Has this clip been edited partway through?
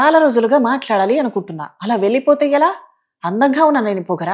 no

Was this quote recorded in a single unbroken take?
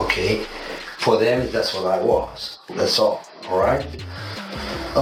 yes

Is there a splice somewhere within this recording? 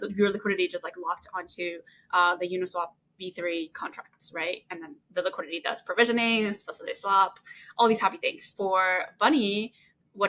yes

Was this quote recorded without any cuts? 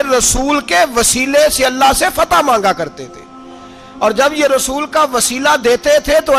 yes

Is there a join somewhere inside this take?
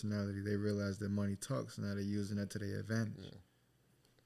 no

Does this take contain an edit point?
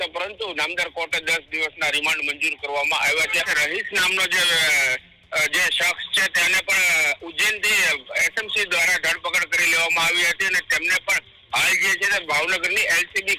yes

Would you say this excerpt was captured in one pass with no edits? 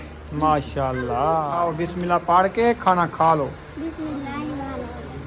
no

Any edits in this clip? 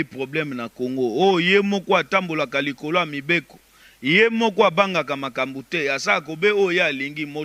no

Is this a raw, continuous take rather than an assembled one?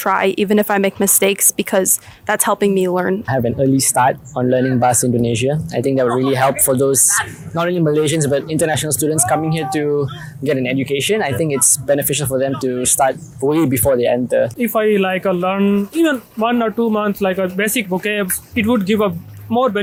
yes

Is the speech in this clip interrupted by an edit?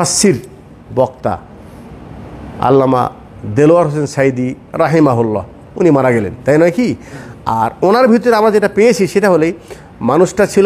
no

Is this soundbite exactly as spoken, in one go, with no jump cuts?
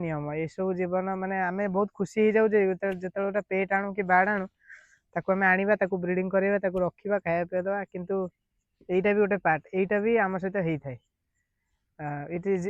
yes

